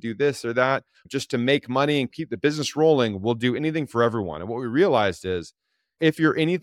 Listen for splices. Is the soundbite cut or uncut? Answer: cut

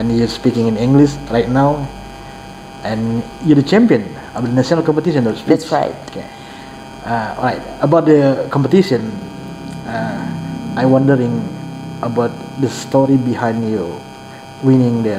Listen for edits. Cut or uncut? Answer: uncut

